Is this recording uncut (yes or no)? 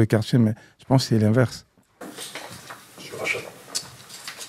yes